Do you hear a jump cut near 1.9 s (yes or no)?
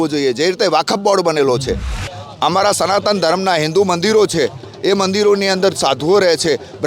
yes